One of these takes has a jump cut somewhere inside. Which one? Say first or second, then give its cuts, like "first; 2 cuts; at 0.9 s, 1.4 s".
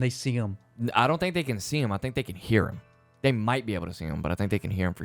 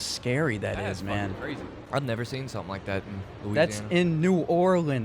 second; 1 cut; at 1.8 s